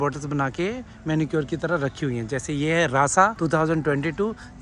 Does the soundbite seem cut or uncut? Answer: cut